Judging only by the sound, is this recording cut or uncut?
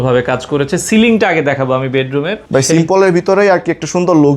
cut